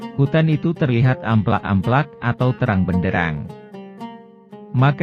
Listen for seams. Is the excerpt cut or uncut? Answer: uncut